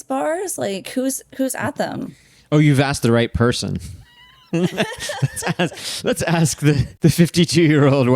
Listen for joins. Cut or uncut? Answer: cut